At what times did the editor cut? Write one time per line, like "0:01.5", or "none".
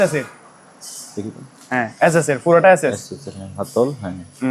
none